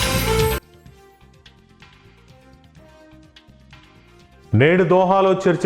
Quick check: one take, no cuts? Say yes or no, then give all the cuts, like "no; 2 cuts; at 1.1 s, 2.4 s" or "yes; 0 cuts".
no; 2 cuts; at 3.1 s, 4.5 s